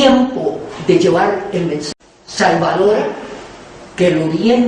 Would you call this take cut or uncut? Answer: uncut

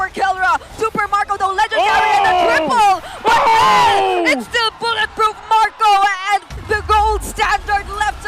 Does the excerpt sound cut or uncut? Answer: cut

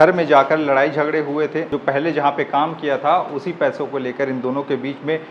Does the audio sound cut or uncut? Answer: cut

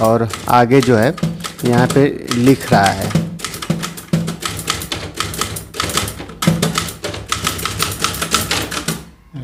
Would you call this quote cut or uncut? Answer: uncut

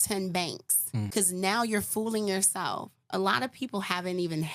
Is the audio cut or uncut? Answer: cut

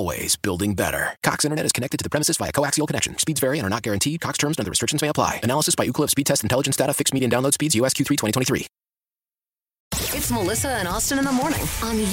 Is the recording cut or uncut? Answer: cut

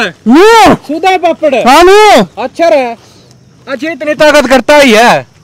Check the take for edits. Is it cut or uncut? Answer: uncut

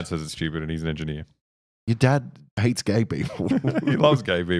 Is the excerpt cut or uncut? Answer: cut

